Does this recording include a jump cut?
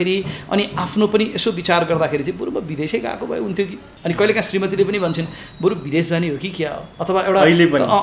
yes; 1 cut; at 3.9 s

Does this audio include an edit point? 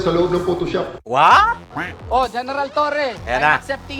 yes; 2 cuts; at 1.0 s, 1.8 s

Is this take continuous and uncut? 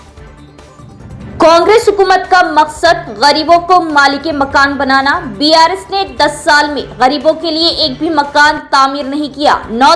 yes; 0 cuts

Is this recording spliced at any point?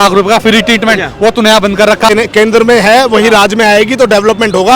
yes; 1 cut; at 2.1 s

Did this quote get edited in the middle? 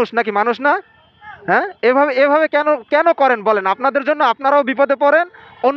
no; 0 cuts

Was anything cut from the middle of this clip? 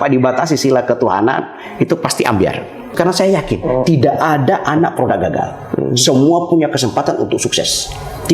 yes; 1 cut; at 2.9 s

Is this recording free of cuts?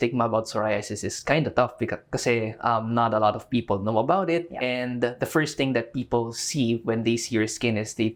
yes; 0 cuts

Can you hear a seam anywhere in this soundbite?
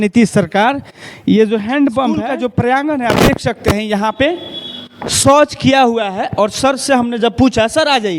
yes; 1 cut; at 2.4 s

